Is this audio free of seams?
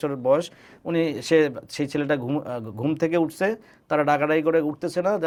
yes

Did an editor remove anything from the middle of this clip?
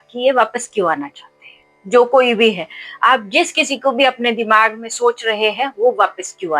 no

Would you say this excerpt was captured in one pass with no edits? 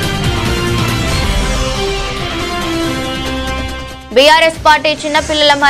no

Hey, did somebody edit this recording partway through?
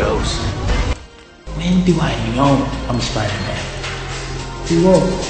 yes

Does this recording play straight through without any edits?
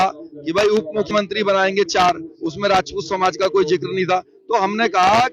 no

